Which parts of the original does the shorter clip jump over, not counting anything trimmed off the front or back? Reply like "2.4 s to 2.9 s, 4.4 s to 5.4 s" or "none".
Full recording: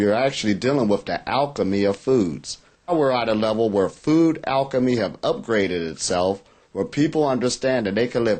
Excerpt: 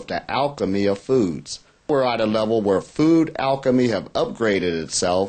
2.9 s to 3.0 s